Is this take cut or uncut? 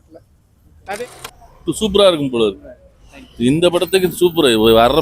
cut